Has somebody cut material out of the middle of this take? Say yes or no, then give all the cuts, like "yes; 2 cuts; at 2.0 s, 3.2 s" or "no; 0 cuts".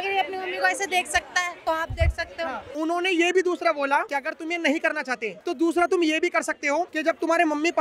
yes; 5 cuts; at 1.5 s, 2.6 s, 4.1 s, 5.3 s, 6.9 s